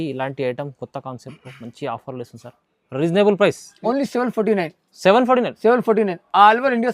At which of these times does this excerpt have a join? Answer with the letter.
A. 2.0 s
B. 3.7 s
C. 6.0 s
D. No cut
B